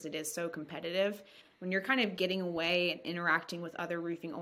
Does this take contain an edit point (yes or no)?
no